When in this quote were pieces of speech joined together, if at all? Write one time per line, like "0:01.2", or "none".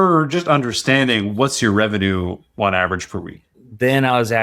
0:03.5